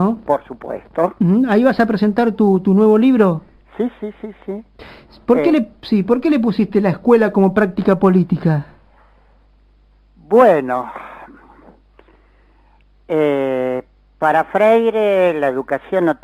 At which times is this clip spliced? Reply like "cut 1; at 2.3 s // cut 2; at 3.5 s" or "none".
cut 1; at 13.9 s